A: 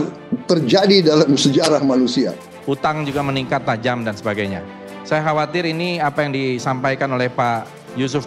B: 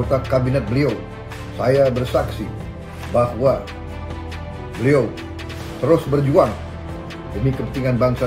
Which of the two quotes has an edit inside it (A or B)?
A